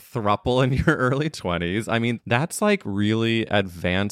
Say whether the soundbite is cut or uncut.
cut